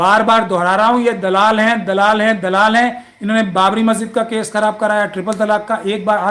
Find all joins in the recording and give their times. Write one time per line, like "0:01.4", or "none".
none

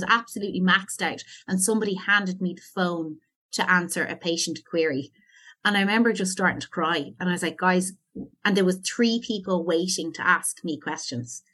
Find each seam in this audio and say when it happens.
none

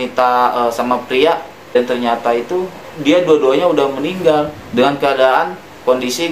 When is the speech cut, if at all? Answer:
0:01.8
0:04.5

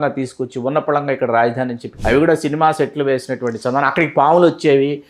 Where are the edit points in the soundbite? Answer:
0:01.8

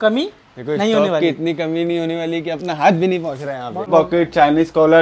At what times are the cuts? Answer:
0:03.9

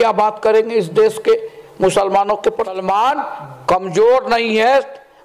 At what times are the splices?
0:02.8

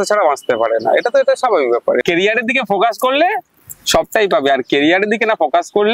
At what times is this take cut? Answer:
0:02.0

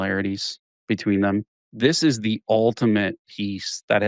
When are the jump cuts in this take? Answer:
0:01.6

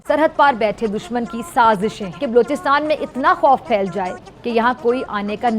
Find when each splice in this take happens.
0:02.1

